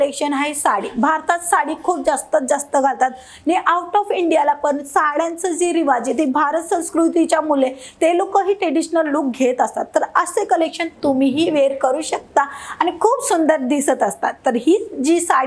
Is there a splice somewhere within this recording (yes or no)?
no